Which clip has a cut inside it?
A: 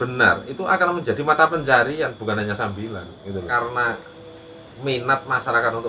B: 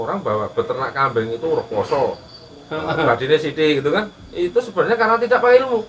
A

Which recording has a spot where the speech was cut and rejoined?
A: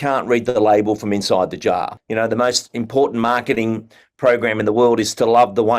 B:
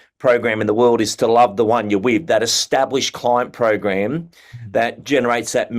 A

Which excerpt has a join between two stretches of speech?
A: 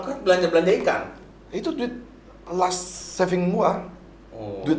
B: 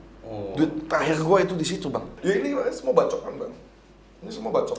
B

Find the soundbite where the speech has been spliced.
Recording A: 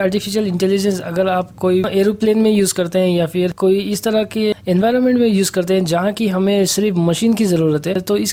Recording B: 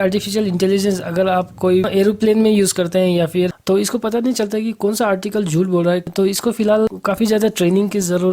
B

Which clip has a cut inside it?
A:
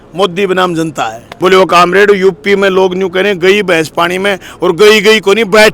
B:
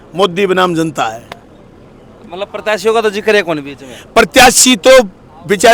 A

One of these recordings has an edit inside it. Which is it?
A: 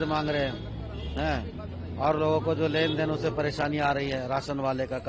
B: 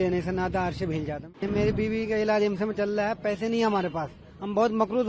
B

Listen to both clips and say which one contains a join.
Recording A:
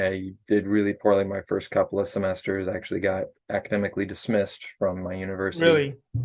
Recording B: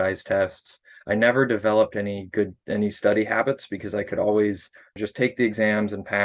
B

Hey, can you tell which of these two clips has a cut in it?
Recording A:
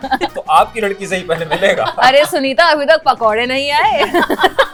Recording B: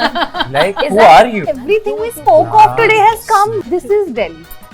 B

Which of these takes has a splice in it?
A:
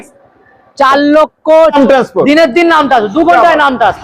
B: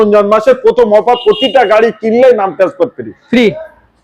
A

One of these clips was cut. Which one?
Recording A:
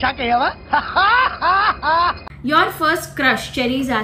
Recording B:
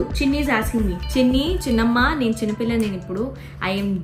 A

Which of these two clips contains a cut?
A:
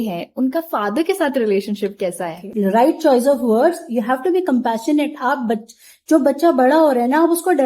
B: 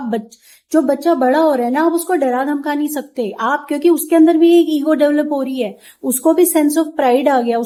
A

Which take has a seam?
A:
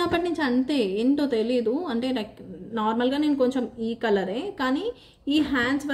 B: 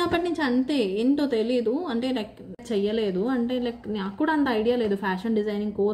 B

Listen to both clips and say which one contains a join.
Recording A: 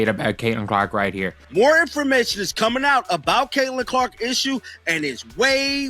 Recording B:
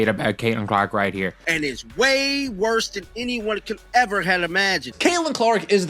B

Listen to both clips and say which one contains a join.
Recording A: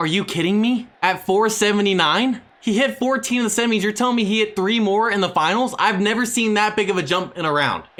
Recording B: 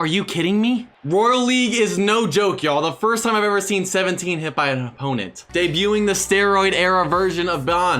B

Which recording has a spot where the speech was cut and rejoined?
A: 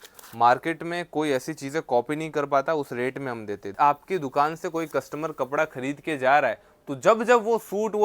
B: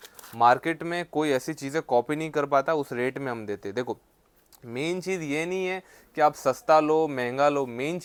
A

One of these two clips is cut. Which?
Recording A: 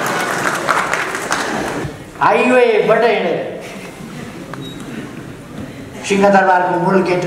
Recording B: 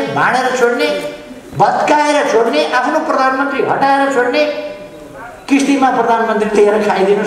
A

